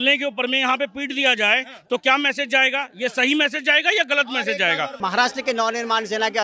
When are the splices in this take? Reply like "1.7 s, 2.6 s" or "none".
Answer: 5.0 s